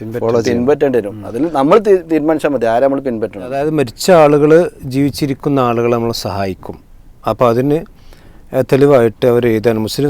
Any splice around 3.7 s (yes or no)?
yes